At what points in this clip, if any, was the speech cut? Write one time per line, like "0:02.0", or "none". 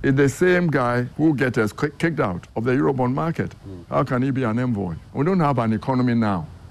0:01.1
0:02.5
0:05.0